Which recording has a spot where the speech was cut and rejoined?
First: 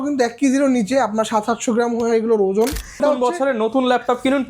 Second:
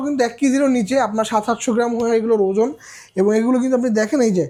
first; 1 cut; at 3.0 s

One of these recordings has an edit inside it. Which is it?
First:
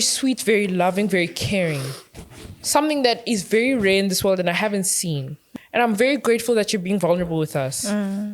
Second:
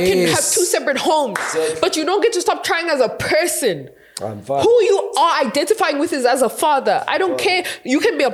first; 1 cut; at 5.4 s

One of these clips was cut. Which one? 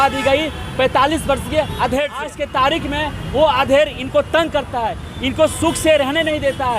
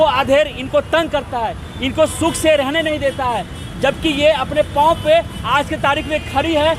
first; 1 cut; at 2.4 s

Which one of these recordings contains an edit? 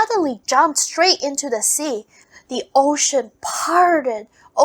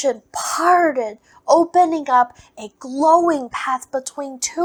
first; 1 cut; at 2.1 s

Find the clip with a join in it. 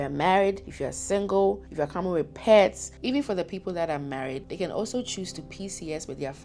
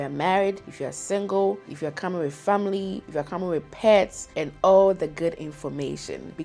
first; 2 cuts; at 1.7 s, 2.9 s

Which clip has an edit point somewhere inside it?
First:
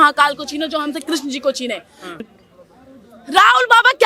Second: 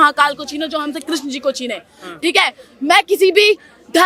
first; 1 cut; at 2.2 s

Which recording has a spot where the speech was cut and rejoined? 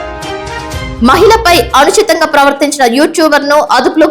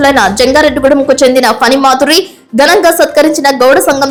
first; 1 cut; at 0.9 s

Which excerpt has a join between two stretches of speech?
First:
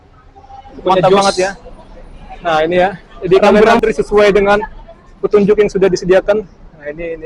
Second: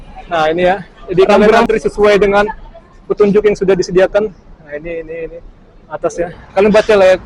first; 1 cut; at 1.2 s

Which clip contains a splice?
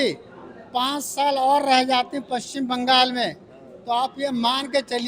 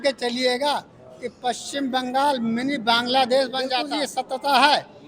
second; 1 cut; at 3.8 s

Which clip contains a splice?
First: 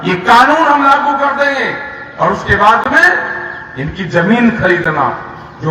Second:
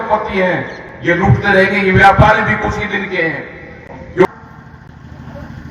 second; 1 cut; at 4.2 s

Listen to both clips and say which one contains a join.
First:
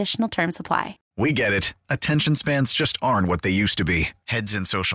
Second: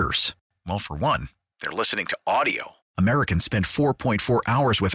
first; 1 cut; at 1.0 s

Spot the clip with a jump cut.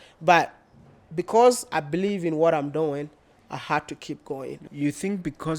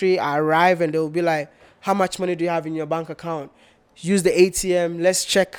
first; 1 cut; at 4.6 s

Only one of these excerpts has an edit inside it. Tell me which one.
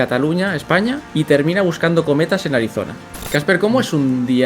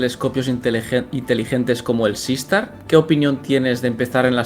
first; 2 cuts; at 1.0 s, 3.0 s

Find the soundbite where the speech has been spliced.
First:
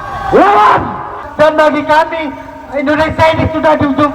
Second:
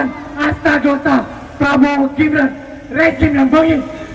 first; 1 cut; at 1.2 s

